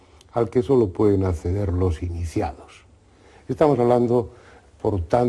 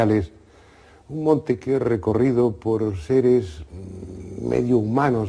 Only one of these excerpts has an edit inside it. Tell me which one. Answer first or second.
second